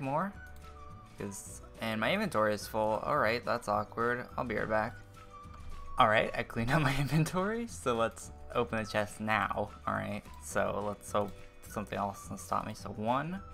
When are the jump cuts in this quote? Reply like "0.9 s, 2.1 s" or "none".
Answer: 1.5 s